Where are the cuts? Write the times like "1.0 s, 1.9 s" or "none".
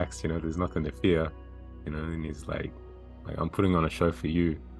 none